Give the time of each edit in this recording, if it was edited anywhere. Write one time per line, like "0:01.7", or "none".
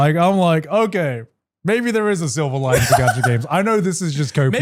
none